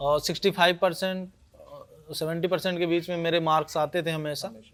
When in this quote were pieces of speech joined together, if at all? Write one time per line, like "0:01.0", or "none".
none